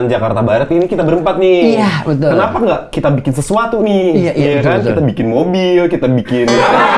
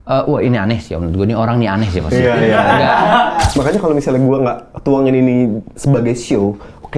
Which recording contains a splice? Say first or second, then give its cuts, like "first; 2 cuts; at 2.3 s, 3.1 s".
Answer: second; 1 cut; at 3.6 s